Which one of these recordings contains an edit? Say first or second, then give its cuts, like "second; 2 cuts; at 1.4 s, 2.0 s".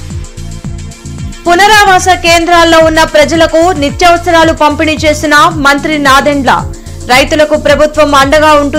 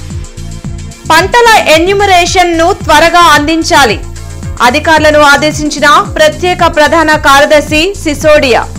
second; 1 cut; at 0.9 s